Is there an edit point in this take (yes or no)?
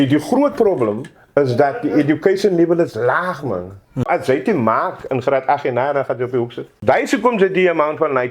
yes